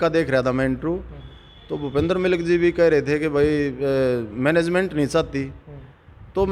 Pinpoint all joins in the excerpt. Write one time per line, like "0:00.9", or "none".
none